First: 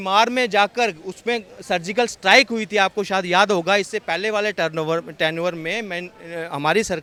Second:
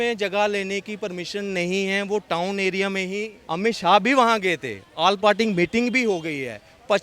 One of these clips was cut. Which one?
second; 1 cut; at 3.4 s

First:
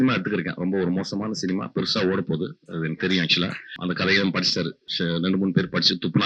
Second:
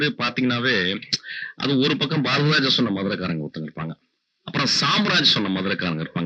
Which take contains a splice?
first; 2 cuts; at 3.7 s, 4.8 s

